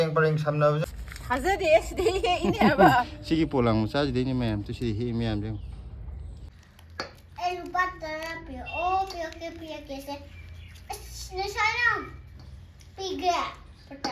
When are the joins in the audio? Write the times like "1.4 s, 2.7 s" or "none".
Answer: 0.8 s, 6.4 s